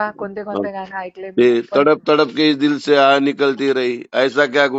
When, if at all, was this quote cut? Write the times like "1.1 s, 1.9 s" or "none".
none